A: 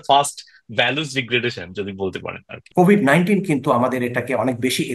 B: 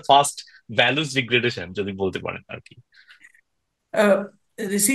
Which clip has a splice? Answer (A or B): A